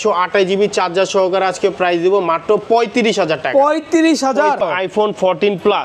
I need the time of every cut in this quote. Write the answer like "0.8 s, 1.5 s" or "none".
4.6 s

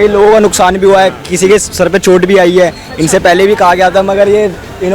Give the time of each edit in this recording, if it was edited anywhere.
none

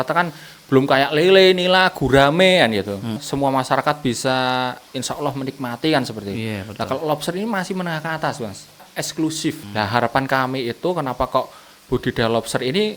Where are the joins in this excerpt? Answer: 3.2 s, 8.8 s, 9.6 s

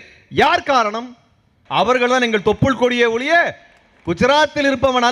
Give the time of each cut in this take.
1.6 s

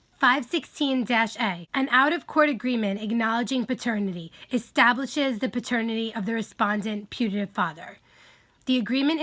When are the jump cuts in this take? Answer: 1.6 s

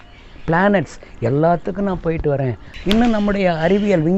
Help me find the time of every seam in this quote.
2.7 s

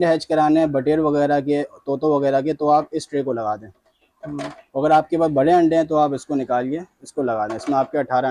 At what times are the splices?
none

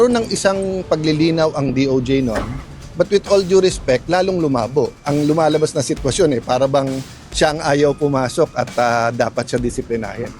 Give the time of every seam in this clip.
5.0 s

